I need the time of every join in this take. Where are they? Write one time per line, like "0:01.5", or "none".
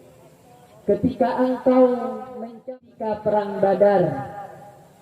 0:02.7